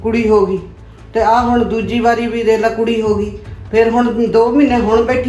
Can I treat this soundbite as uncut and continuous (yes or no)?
yes